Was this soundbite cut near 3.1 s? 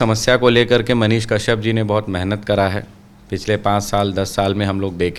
no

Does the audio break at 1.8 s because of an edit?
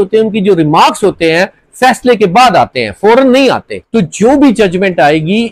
no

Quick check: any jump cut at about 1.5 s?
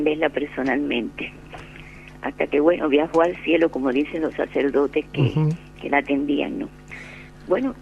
no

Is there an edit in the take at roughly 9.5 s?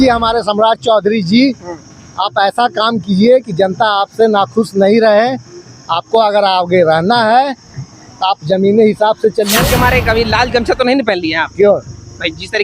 yes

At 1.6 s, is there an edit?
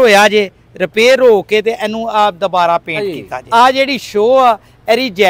no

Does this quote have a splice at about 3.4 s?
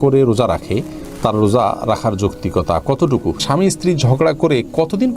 yes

